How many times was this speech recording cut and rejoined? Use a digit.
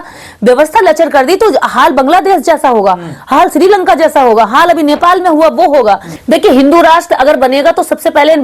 1